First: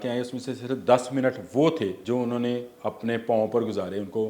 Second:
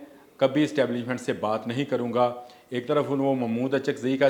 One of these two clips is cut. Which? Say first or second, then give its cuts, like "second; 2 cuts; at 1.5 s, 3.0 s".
first; 1 cut; at 2.0 s